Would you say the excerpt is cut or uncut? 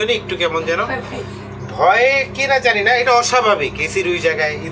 uncut